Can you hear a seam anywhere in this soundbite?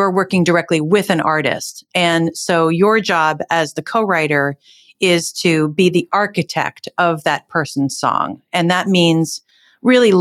no; 0 cuts

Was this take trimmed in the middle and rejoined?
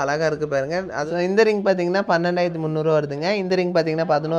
yes; 1 cut; at 1.1 s

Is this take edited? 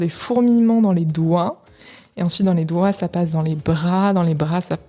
no; 0 cuts

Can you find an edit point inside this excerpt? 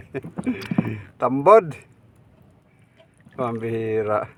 no; 0 cuts

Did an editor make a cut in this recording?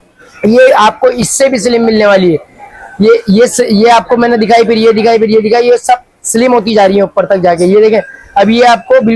no; 0 cuts

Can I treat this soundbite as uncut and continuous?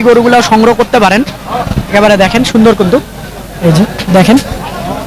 yes; 0 cuts

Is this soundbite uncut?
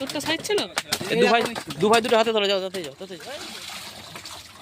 no; 1 cut; at 3.1 s

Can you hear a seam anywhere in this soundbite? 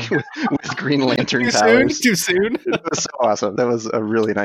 yes; 1 cut; at 3.5 s

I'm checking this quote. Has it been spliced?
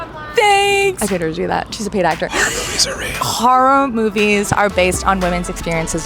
yes; 2 cuts; at 1.0 s, 2.3 s

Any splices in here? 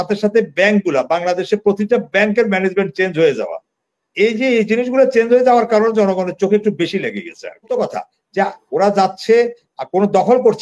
yes; 1 cut; at 7.6 s

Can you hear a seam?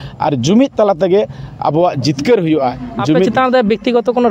yes; 1 cut; at 3.3 s

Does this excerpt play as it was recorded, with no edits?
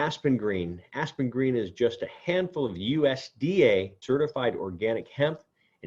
no; 1 cut; at 4.0 s

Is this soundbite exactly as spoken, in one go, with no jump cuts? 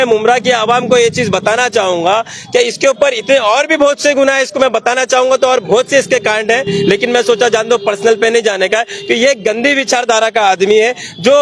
yes; 0 cuts

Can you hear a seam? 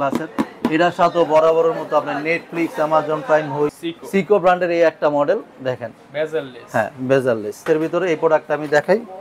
yes; 2 cuts; at 3.8 s, 7.6 s

